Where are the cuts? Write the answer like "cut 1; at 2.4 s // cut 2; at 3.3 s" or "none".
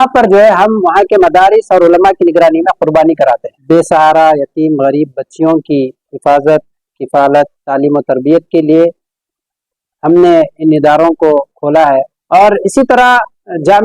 cut 1; at 3.5 s // cut 2; at 12.2 s